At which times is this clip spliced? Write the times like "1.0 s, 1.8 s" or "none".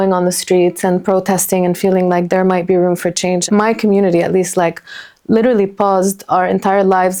none